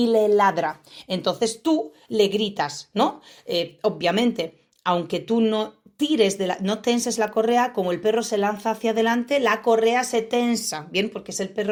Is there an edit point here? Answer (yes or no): no